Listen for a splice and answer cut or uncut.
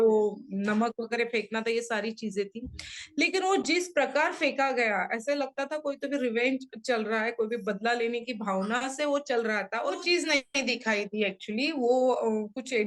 cut